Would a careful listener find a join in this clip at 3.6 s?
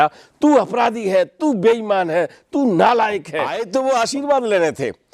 yes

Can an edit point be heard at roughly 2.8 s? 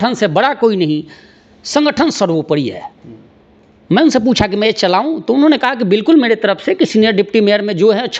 no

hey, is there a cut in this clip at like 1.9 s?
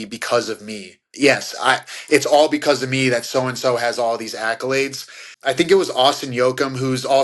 no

